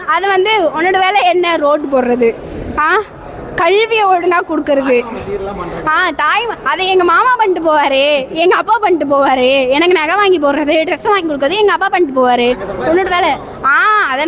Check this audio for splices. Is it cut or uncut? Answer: uncut